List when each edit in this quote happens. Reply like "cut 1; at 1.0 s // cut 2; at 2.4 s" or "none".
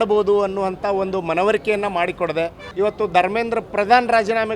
cut 1; at 2.6 s